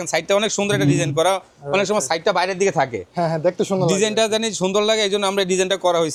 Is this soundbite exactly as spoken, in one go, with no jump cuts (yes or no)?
yes